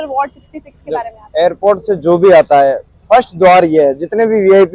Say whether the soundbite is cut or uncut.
uncut